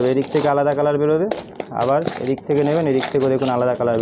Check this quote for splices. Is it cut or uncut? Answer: uncut